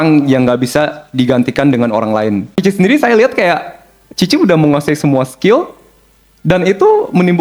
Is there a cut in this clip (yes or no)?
yes